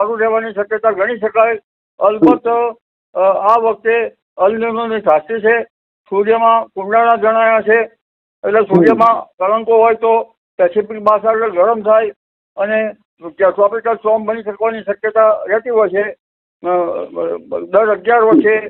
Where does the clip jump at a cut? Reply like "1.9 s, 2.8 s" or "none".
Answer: none